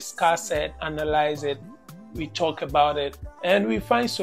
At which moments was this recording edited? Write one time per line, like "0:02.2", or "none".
0:03.2